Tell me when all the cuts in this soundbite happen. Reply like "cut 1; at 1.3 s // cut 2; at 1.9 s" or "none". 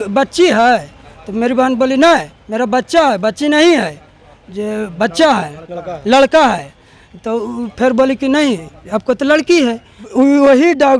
cut 1; at 10.1 s